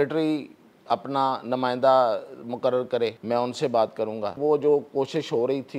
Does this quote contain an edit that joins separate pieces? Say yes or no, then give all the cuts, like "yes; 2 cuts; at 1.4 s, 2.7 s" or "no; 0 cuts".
yes; 2 cuts; at 3.2 s, 4.4 s